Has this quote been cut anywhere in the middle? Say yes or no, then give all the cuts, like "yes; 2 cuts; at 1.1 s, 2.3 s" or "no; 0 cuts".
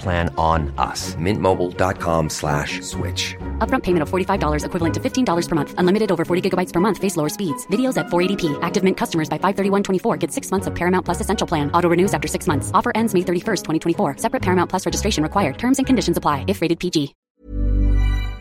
yes; 1 cut; at 17.2 s